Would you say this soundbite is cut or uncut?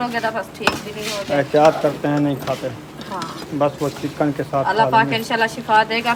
uncut